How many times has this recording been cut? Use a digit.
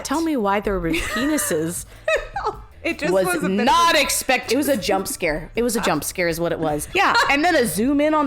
2